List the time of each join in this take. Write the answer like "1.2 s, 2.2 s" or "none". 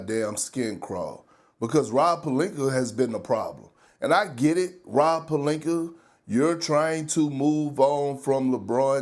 none